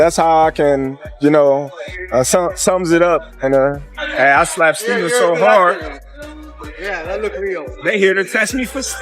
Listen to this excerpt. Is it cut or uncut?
cut